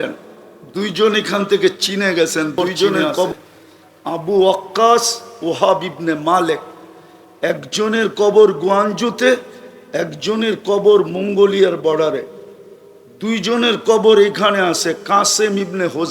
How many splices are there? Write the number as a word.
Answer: one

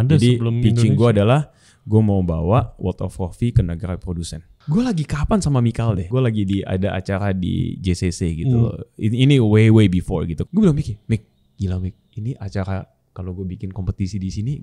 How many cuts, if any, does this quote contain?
three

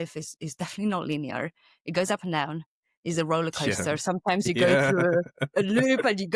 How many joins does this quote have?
zero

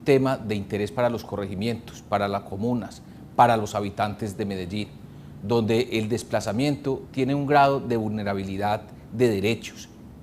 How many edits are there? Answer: one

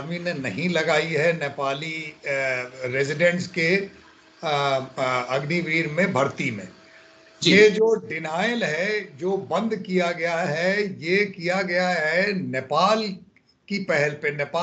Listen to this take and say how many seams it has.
zero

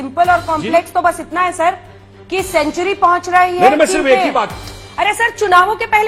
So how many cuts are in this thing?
zero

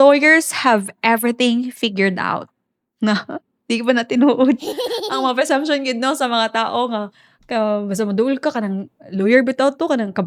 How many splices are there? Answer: zero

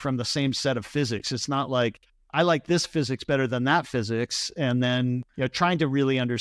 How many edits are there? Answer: one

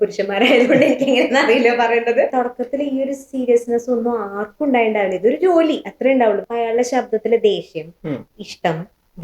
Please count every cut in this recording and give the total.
two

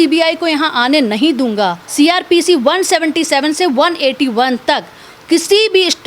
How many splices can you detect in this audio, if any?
one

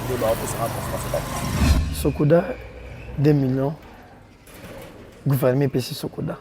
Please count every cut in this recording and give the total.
one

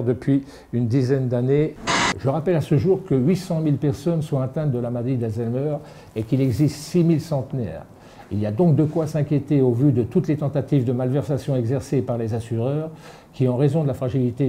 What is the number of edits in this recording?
one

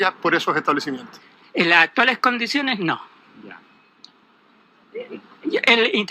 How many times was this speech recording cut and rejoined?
one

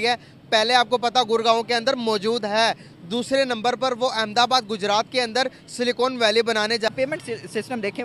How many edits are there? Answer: one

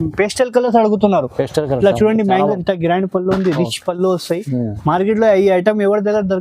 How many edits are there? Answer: one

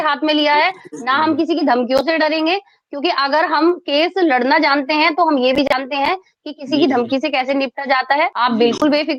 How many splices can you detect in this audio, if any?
zero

